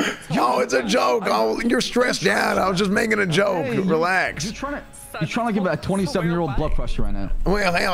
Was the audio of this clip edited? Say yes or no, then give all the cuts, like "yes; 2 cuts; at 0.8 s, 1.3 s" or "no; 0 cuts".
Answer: no; 0 cuts